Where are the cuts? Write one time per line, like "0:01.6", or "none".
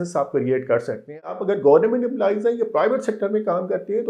0:01.3